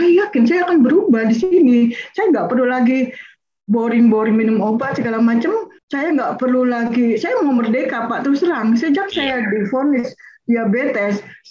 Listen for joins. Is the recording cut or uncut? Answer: cut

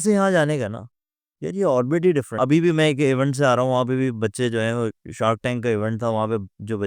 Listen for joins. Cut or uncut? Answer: cut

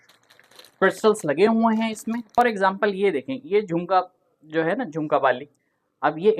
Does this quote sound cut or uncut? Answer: cut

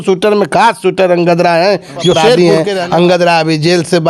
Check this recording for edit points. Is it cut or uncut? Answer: cut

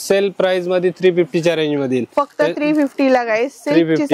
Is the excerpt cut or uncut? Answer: uncut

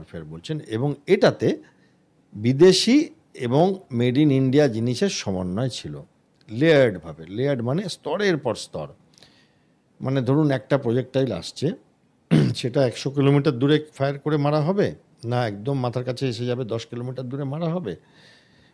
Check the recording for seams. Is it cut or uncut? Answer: uncut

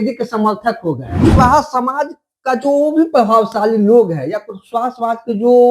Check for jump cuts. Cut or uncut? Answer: cut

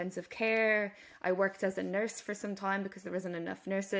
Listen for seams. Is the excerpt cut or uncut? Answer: uncut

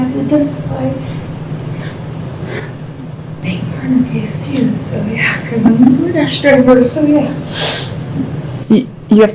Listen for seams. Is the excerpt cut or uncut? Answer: cut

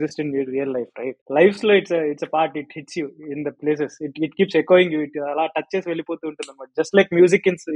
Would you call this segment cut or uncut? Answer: cut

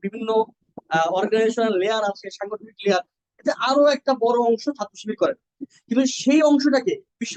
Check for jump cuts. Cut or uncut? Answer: uncut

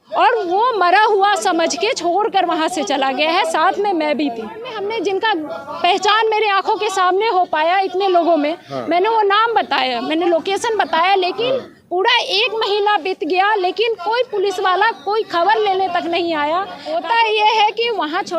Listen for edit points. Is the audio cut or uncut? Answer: cut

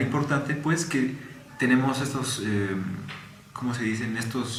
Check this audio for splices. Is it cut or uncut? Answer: uncut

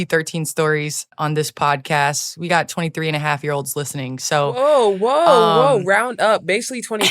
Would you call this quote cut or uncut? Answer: cut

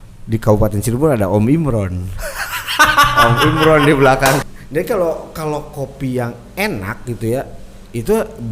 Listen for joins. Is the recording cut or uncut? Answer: cut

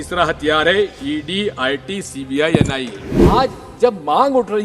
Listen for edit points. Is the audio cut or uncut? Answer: cut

